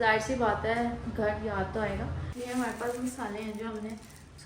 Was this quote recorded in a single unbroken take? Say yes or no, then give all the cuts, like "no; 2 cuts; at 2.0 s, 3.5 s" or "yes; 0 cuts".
no; 1 cut; at 2.3 s